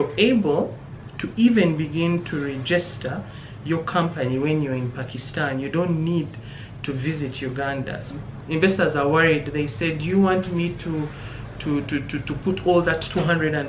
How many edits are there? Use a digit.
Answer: 1